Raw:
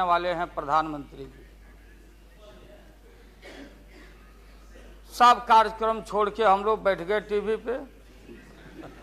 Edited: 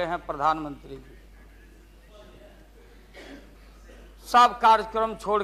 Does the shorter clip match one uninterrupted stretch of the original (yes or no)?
no